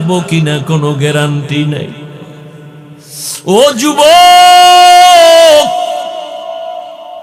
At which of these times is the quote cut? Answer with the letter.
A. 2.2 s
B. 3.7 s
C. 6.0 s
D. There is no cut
D